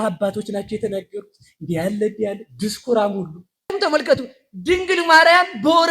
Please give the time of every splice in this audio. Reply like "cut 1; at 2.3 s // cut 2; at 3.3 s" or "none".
cut 1; at 3.9 s